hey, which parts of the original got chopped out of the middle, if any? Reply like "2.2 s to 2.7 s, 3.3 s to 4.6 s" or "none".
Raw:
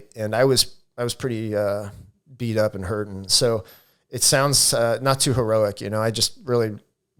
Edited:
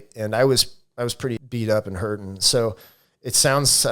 1.4 s to 2.3 s